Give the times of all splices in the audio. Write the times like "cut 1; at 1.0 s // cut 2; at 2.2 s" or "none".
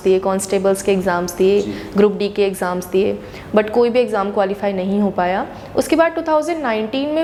none

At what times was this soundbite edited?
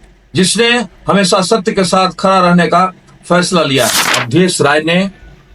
cut 1; at 4.1 s

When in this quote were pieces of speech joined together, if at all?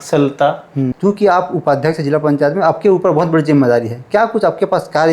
cut 1; at 0.9 s

